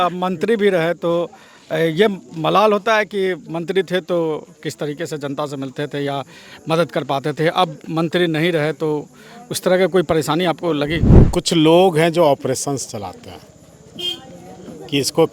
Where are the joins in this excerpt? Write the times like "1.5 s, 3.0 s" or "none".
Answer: 11.2 s